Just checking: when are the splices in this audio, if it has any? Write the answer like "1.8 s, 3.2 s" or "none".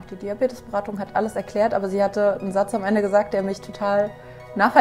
none